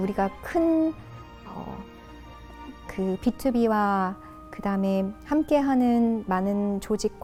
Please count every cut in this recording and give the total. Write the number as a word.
zero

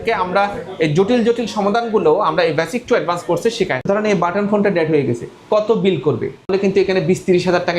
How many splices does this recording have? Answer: two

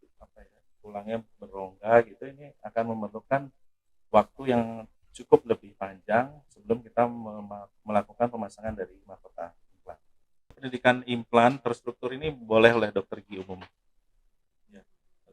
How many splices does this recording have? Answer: one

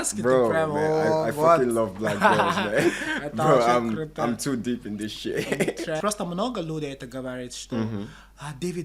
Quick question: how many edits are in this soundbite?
one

